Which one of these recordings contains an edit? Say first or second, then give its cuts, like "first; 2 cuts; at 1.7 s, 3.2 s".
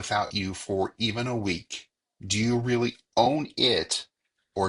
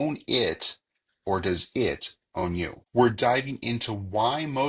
second; 1 cut; at 2.8 s